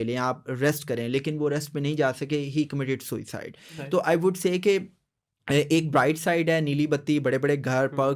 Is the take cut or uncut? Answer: uncut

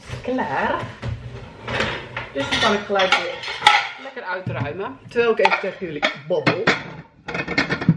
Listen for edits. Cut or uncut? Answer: uncut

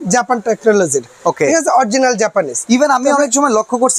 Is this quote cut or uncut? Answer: uncut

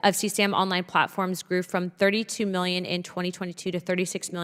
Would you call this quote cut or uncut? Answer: uncut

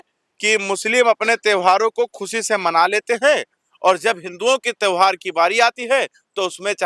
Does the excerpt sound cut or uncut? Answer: uncut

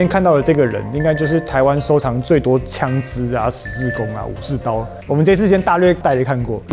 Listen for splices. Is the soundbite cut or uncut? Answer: uncut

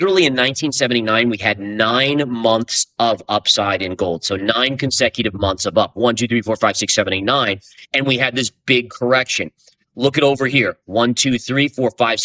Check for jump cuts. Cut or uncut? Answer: uncut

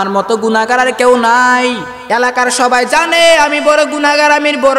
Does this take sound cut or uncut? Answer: cut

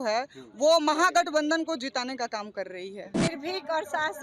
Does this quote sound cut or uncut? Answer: cut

